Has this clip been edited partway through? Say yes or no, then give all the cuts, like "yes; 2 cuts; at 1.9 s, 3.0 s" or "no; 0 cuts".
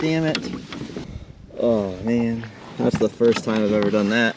yes; 1 cut; at 1.0 s